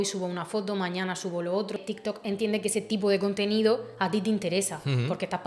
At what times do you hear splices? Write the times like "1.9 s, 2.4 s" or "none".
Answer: 1.8 s